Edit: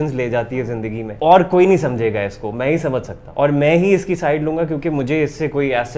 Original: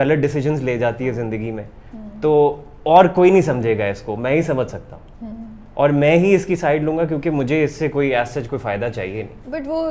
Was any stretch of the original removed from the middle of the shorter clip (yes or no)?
yes